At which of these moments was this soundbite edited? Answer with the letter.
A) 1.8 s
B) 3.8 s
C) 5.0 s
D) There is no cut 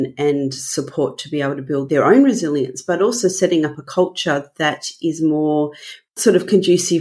A